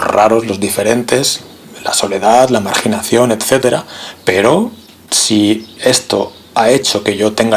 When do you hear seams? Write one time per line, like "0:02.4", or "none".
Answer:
none